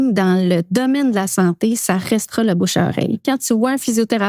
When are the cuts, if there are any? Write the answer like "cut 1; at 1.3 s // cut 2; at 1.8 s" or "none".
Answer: cut 1; at 3.2 s